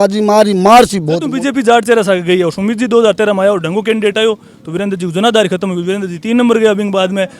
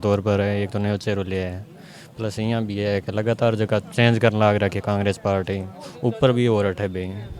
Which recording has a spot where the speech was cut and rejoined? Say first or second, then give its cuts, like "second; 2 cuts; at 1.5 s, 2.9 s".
first; 1 cut; at 1.3 s